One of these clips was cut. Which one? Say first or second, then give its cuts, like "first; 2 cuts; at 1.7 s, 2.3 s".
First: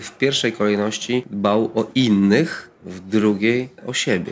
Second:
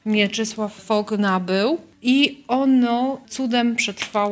second; 3 cuts; at 0.8 s, 1.9 s, 3.2 s